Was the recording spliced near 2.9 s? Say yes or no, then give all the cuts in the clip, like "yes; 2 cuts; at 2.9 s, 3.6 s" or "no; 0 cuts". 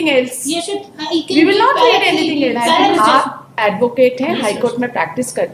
yes; 1 cut; at 2.9 s